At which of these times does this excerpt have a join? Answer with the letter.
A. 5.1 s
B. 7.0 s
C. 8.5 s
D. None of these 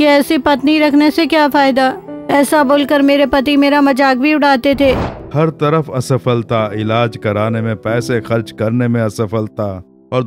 A